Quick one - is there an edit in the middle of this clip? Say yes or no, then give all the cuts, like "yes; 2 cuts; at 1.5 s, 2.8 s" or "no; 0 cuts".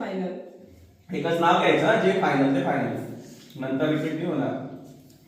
no; 0 cuts